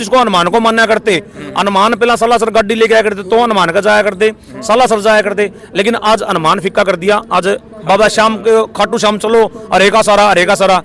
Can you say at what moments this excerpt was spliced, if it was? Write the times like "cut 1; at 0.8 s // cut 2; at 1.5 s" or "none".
none